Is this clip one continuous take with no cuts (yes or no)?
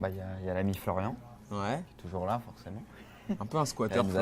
yes